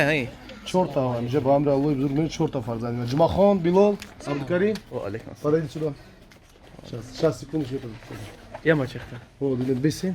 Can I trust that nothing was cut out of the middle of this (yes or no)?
yes